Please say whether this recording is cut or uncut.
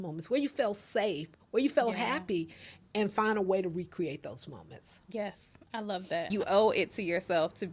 cut